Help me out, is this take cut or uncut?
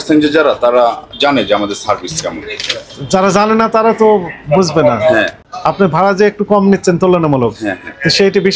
uncut